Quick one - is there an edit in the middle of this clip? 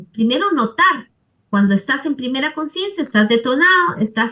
no; 0 cuts

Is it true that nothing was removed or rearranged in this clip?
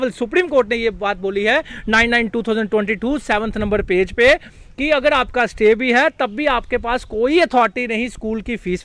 yes; 0 cuts

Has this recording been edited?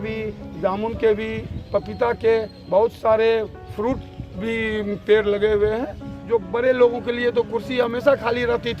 yes; 1 cut; at 6.2 s

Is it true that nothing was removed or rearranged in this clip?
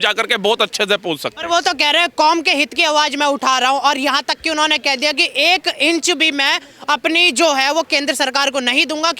yes; 0 cuts

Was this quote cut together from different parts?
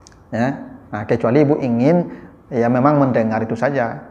no; 0 cuts

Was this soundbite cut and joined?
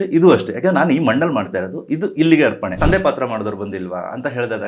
yes; 1 cut; at 2.8 s

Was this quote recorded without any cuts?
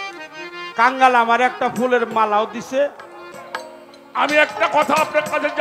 no; 1 cut; at 3.3 s

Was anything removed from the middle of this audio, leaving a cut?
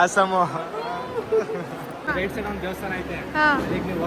no; 0 cuts

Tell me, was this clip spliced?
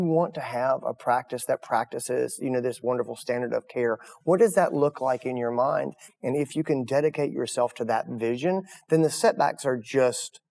no; 0 cuts

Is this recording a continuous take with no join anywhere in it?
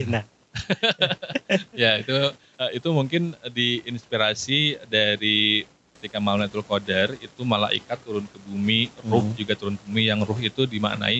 no; 2 cuts; at 2.5 s, 6.0 s

